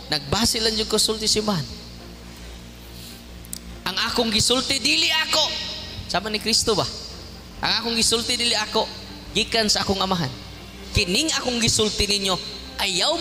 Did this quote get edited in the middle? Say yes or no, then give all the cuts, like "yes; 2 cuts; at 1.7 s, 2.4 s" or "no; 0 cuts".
yes; 2 cuts; at 3.8 s, 10.8 s